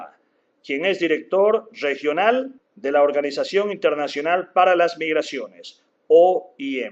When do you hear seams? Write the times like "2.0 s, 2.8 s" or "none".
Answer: 5.0 s